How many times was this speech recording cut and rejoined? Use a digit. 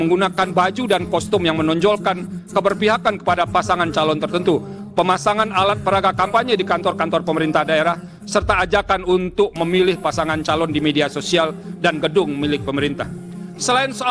0